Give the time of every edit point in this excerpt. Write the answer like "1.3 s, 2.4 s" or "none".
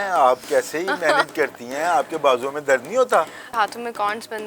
3.5 s

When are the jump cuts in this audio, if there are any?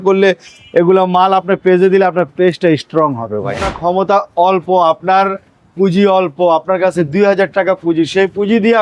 3.6 s

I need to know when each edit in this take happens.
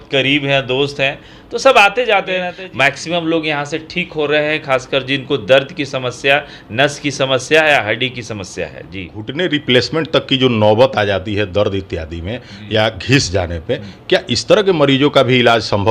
2.5 s, 9.2 s

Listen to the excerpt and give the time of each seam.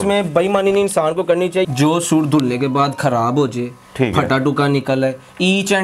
1.7 s

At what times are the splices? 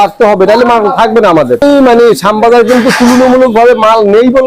1.6 s

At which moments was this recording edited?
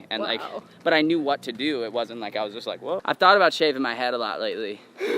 3.0 s

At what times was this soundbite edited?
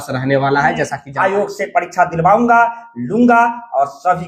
1.0 s

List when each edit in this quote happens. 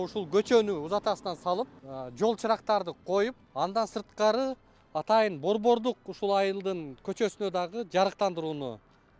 1.8 s, 3.4 s

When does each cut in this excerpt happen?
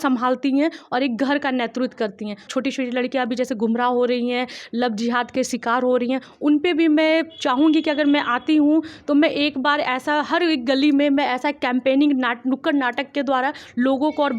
2.5 s

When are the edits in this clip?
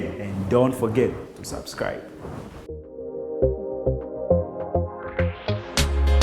2.5 s

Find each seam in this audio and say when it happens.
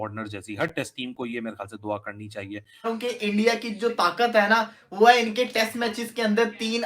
2.9 s

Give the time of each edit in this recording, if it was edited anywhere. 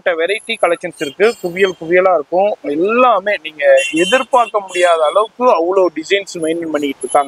none

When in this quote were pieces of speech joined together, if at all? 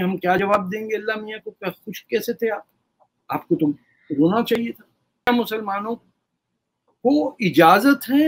5.3 s

